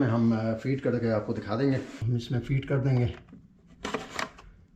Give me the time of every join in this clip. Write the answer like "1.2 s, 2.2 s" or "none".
1.9 s